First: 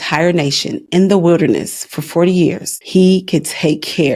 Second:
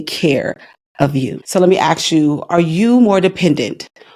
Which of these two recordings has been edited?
second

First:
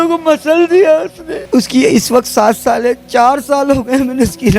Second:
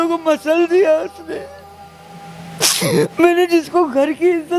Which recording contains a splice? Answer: first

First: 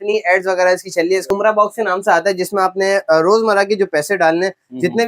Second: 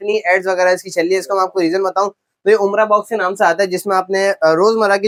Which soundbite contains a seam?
first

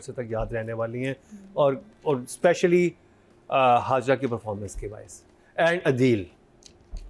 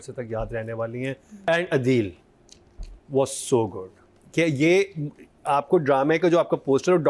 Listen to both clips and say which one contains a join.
second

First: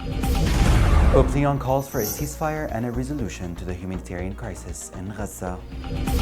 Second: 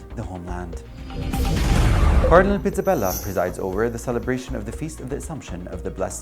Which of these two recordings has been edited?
first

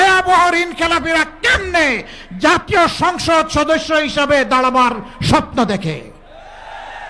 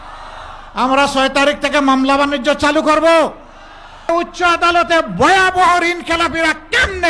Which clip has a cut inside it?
second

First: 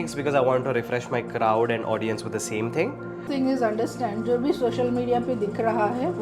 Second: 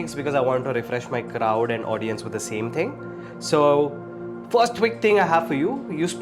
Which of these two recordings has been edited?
first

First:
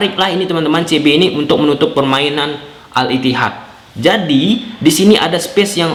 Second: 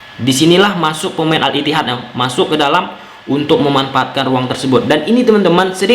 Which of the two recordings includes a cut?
second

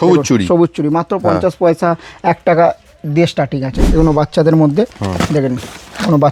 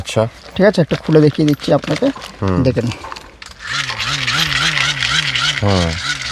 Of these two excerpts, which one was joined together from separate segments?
first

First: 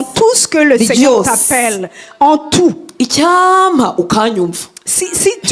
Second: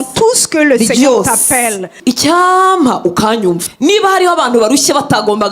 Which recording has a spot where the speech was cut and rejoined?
second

